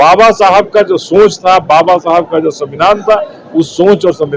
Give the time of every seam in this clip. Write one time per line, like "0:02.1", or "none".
none